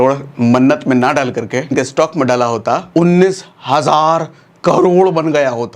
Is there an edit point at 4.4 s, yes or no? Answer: no